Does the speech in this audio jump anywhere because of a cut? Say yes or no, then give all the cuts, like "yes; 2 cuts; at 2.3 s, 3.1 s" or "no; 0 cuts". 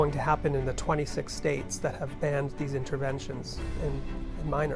yes; 1 cut; at 3.7 s